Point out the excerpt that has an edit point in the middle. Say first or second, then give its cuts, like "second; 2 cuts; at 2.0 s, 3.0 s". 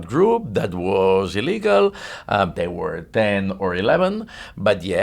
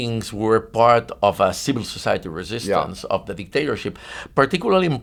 first; 1 cut; at 2.5 s